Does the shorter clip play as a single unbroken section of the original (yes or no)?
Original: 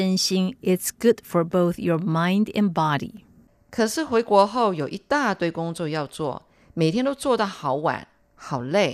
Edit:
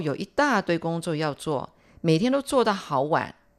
yes